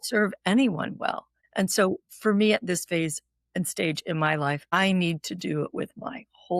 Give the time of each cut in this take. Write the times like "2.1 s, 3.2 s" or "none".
1.4 s, 4.7 s

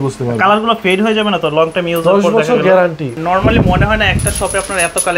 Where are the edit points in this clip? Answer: 3.1 s

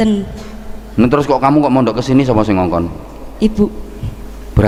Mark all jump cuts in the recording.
none

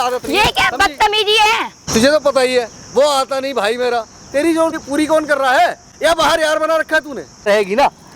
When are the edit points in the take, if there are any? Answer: 1.7 s, 4.8 s, 7.4 s

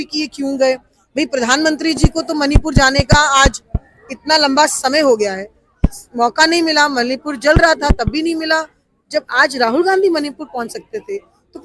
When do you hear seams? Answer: none

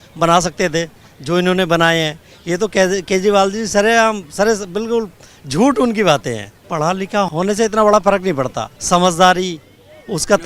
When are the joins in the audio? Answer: 6.6 s, 7.3 s, 8.7 s

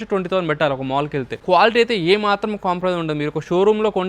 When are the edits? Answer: 1.4 s

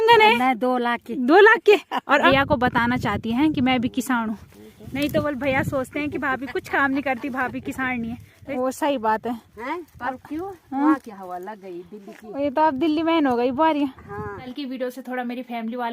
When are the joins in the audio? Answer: 2.2 s, 8.4 s, 14.5 s

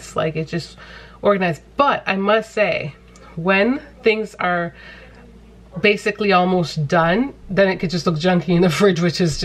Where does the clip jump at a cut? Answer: none

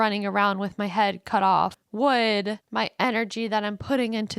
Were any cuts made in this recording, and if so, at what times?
1.8 s, 2.6 s

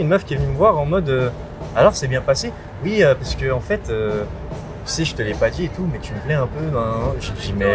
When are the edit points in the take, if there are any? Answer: none

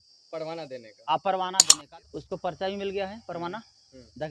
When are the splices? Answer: 1.7 s

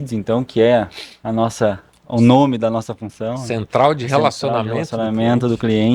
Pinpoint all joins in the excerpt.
none

